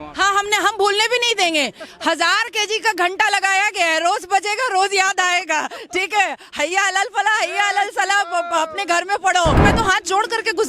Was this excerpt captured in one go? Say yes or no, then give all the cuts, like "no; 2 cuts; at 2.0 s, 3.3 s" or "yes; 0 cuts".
no; 1 cut; at 9.6 s